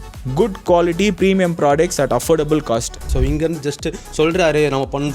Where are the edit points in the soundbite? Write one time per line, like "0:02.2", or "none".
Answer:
0:03.1